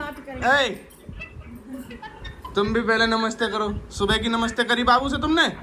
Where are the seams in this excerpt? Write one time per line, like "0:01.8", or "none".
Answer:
none